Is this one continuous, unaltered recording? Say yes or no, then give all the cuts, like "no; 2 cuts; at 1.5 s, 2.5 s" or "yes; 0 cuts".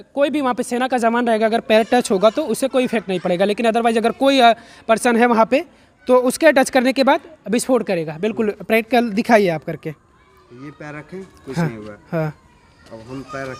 yes; 0 cuts